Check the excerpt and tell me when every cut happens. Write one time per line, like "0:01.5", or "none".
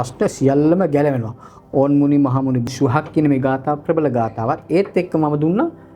0:02.7